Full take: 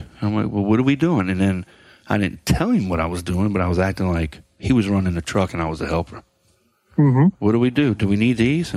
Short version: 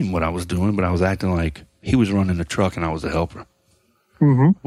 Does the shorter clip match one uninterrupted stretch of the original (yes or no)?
yes